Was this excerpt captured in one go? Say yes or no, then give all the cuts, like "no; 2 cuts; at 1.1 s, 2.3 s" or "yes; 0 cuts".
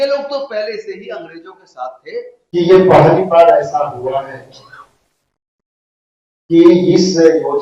no; 1 cut; at 2.4 s